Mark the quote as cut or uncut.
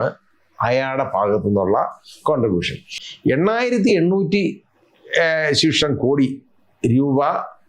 cut